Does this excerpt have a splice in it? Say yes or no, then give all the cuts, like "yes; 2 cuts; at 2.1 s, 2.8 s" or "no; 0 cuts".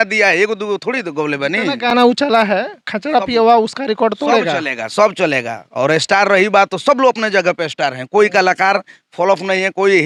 no; 0 cuts